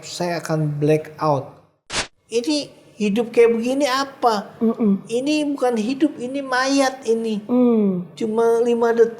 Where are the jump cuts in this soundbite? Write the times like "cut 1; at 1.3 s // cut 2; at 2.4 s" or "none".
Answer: cut 1; at 1.7 s